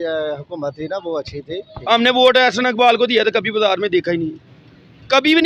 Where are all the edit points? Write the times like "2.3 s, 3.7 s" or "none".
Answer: 1.7 s